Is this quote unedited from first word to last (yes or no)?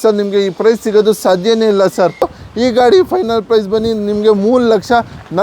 no